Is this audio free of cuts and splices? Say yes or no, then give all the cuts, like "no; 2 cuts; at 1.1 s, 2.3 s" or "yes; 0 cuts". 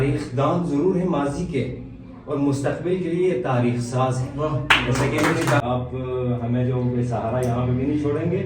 no; 1 cut; at 5.6 s